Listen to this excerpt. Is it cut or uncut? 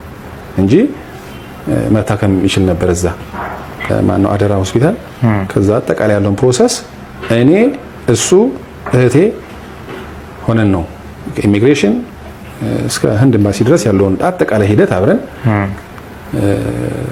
uncut